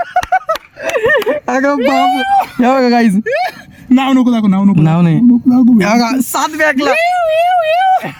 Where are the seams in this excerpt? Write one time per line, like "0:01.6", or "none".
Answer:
none

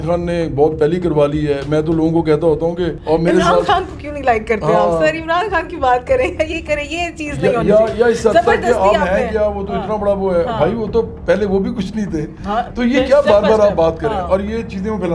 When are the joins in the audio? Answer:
0:03.0

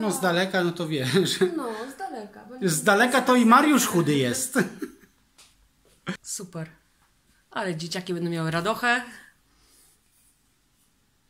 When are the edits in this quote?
0:06.2

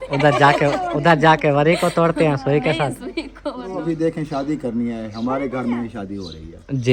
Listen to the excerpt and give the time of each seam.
0:03.7

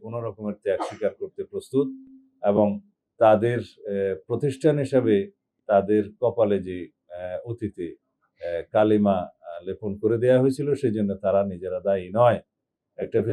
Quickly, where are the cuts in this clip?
none

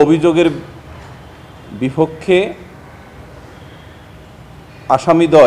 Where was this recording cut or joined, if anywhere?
none

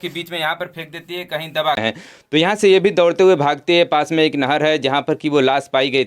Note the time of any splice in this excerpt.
0:01.8

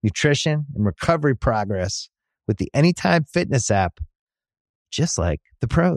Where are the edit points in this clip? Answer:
none

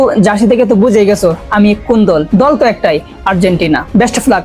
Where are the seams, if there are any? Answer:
0:02.3

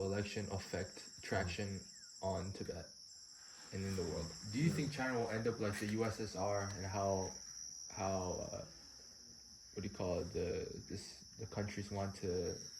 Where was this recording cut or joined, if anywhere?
0:04.3

